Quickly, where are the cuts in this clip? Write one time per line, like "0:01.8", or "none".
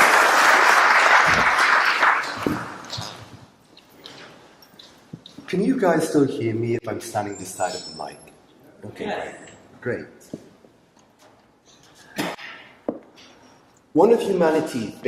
0:03.3